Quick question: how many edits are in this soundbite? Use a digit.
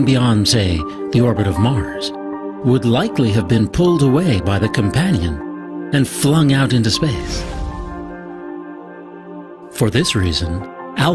1